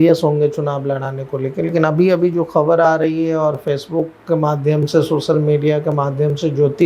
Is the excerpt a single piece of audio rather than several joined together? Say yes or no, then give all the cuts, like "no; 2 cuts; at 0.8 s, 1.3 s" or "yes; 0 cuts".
yes; 0 cuts